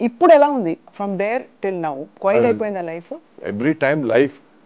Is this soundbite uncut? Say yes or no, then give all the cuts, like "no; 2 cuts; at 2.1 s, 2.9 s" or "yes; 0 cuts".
no; 2 cuts; at 2.1 s, 3.2 s